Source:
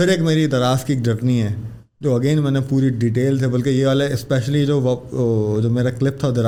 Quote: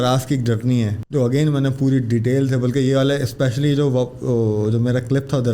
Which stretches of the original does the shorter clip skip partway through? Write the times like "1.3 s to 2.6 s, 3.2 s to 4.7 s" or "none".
1.6 s to 1.9 s